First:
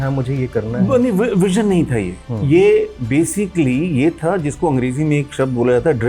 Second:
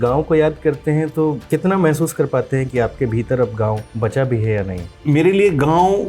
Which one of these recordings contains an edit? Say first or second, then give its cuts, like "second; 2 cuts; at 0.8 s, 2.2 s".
second; 3 cuts; at 1.4 s, 3.9 s, 4.9 s